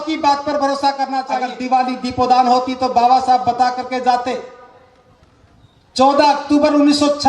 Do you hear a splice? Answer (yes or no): yes